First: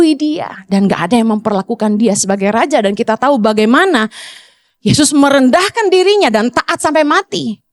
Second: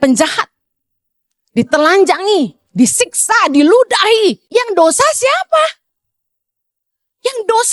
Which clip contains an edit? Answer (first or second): second